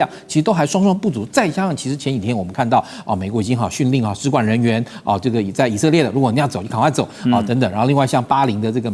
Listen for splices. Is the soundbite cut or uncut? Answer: uncut